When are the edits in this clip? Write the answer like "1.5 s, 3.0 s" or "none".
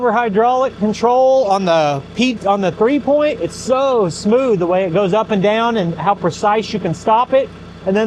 none